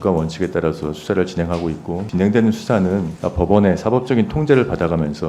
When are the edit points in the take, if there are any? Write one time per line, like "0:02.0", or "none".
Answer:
0:02.0
0:03.2

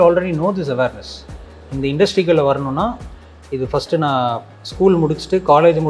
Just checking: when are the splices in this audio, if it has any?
none

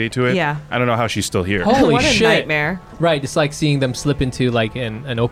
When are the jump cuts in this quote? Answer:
0:02.9

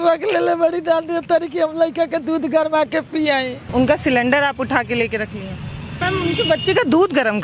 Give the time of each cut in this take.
0:03.7
0:05.9

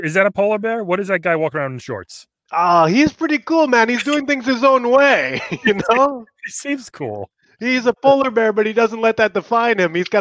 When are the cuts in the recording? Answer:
none

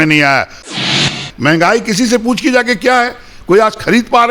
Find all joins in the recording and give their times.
0:01.1

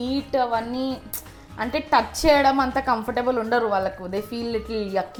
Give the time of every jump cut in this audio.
none

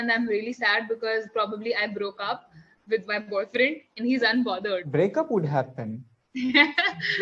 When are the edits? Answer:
0:04.9

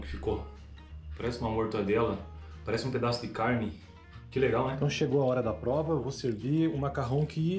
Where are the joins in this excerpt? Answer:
0:04.8

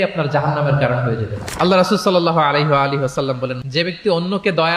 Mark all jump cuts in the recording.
0:03.6

